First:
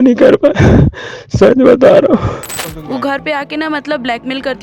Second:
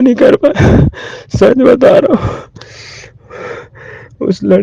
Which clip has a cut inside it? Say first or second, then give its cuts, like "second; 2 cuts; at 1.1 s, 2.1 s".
first; 1 cut; at 2.7 s